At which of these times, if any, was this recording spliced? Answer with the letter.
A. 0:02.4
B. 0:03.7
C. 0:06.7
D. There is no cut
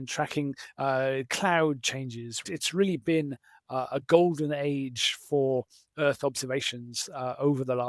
A